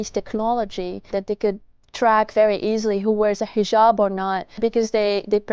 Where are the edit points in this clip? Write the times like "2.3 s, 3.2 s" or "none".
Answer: 1.1 s, 4.6 s